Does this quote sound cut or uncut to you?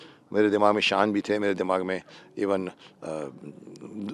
uncut